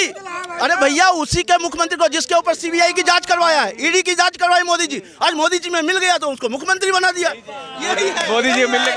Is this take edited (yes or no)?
no